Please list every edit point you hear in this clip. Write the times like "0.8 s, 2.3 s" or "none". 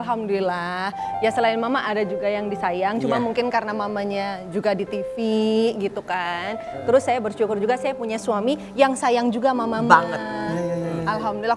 none